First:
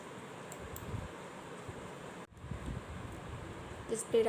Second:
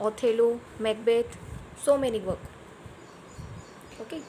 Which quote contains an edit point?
first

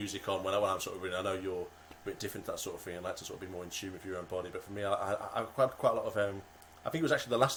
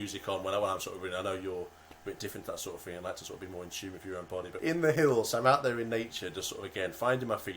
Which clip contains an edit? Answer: second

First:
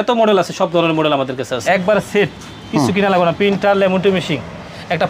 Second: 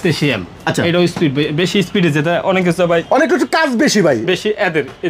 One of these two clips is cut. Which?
first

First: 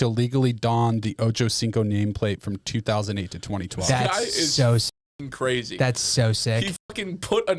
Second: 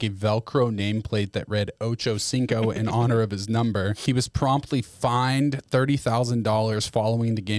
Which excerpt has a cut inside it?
second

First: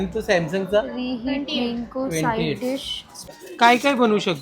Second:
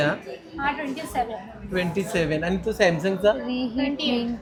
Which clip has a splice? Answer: first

